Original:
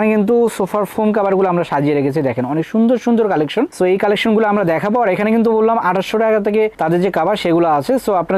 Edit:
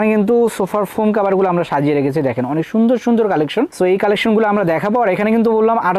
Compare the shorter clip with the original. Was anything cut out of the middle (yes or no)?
no